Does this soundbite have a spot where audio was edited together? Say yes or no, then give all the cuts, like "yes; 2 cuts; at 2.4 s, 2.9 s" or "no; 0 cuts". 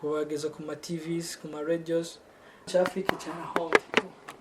yes; 1 cut; at 2.7 s